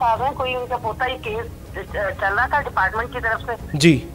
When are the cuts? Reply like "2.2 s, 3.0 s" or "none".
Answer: none

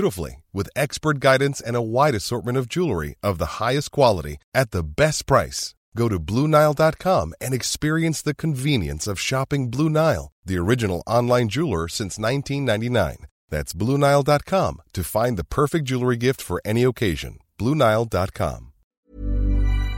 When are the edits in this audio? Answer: 19.1 s

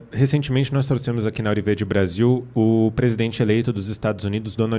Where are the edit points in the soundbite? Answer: none

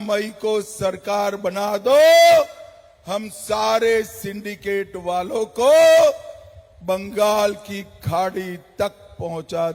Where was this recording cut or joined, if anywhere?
none

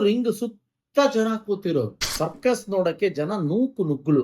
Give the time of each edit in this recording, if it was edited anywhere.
2.0 s

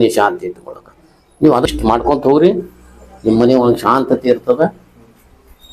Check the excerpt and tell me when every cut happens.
1.7 s

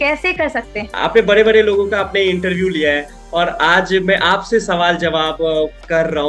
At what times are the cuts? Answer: 0.9 s

